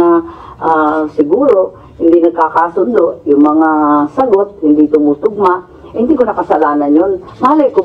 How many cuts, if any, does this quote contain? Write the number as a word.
zero